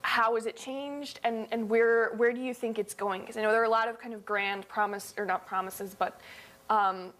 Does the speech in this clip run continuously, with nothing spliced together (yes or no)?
yes